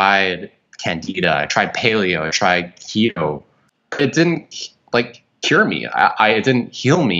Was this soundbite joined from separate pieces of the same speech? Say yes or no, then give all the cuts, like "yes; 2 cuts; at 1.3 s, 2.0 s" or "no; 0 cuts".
yes; 1 cut; at 3.5 s